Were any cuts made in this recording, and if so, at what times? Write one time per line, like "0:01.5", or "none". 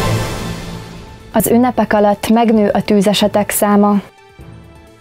0:01.4

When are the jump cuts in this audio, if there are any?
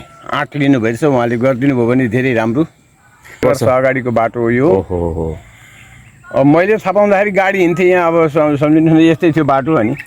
0:03.4

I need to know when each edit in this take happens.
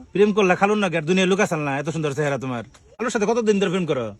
0:03.0

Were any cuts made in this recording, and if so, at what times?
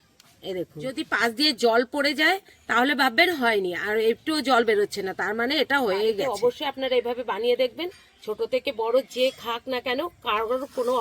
0:00.9
0:06.2

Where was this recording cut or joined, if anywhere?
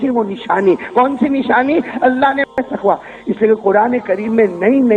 0:02.5

